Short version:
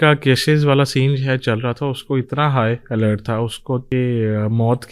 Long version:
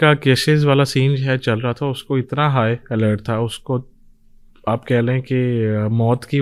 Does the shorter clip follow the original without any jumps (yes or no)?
no